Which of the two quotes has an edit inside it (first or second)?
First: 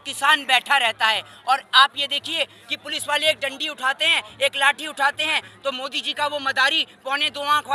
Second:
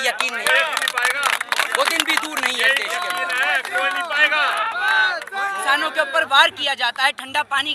second